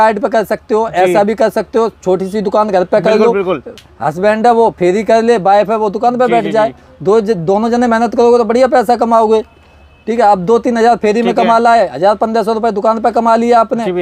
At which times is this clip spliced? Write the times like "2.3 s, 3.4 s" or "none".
none